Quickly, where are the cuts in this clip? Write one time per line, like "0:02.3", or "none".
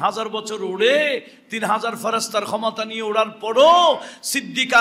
none